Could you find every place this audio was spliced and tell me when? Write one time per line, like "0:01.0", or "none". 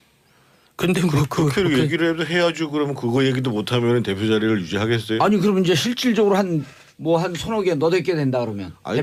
none